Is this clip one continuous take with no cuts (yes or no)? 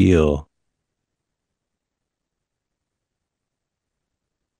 no